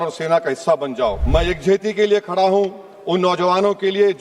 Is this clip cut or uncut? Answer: cut